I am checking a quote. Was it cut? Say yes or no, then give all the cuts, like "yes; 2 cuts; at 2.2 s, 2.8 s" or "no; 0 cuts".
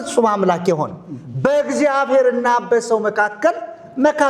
no; 0 cuts